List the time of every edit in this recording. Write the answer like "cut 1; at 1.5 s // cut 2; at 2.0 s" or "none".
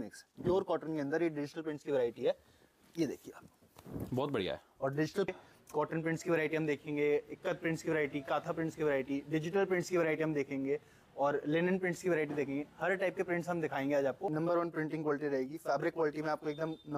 cut 1; at 5.3 s // cut 2; at 14.3 s